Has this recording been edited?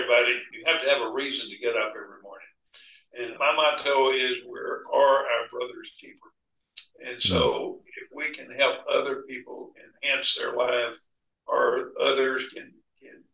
yes; 1 cut; at 3.3 s

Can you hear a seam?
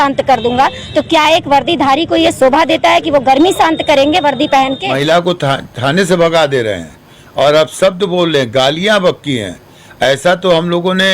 yes; 1 cut; at 4.8 s

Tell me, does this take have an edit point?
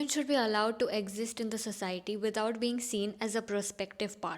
no; 0 cuts

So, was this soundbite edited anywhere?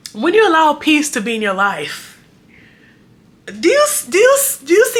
no; 0 cuts

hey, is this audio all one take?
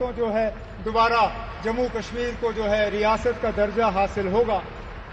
yes; 0 cuts

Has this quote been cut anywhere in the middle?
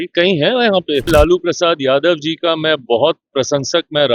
yes; 1 cut; at 1.1 s

